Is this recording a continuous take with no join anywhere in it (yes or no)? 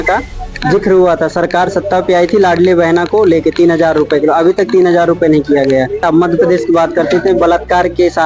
no